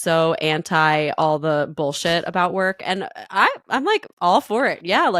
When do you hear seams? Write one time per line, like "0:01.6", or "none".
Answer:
none

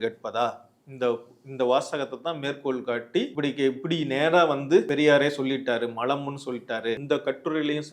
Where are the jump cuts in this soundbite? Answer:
0:03.3
0:04.9
0:07.0

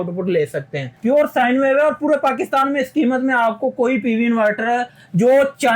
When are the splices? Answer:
0:00.9

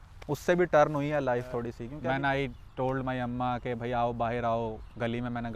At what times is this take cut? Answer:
0:01.8

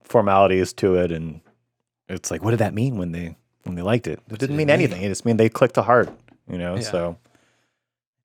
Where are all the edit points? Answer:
none

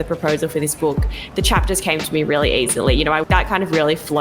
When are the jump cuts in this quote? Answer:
0:03.2

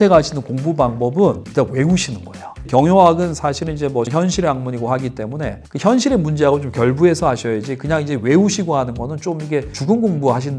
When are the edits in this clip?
0:02.6
0:04.1

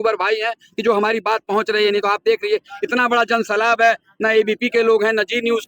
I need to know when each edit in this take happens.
none

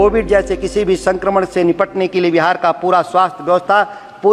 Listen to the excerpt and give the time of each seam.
none

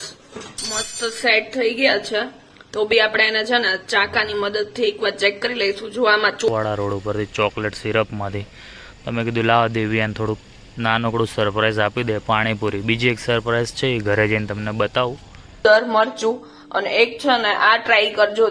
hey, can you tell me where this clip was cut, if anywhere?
0:06.5
0:15.6

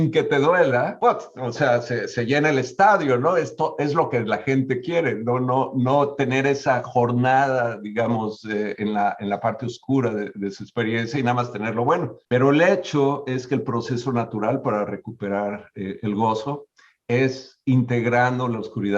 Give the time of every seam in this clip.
0:00.9
0:12.2

